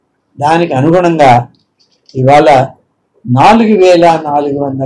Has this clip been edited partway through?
no; 0 cuts

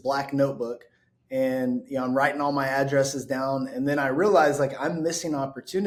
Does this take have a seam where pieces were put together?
no; 0 cuts

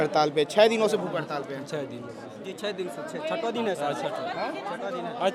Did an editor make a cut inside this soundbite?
no; 0 cuts

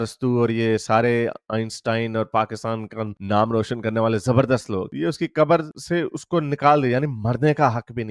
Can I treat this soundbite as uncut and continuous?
yes; 0 cuts

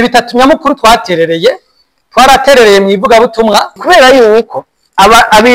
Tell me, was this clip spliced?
yes; 1 cut; at 3.8 s

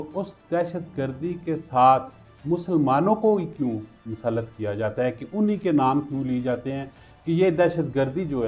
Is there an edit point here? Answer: no; 0 cuts

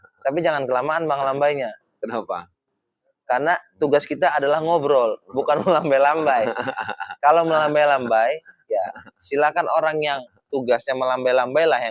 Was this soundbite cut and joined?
no; 0 cuts

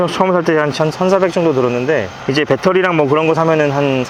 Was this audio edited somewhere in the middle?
no; 0 cuts

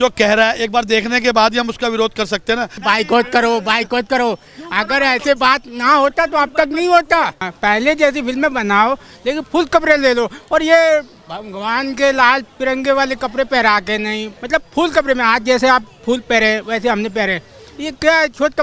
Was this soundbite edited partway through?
yes; 3 cuts; at 2.7 s, 7.5 s, 14.3 s

